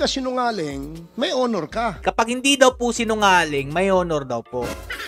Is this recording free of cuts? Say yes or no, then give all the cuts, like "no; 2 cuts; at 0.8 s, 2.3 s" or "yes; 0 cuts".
yes; 0 cuts